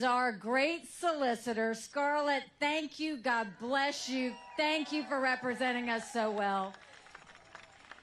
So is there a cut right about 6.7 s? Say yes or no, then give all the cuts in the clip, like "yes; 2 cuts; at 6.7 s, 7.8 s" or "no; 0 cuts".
no; 1 cut; at 4.5 s